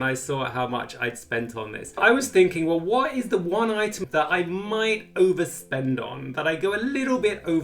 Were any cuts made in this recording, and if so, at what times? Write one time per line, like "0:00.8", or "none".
0:02.0
0:04.0